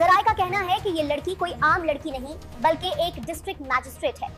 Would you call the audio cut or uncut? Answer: uncut